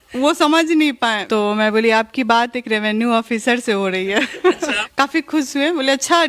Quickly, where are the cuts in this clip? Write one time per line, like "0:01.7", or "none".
0:01.2
0:04.8